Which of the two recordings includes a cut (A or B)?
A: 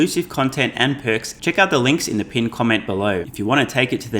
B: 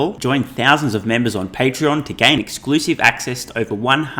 A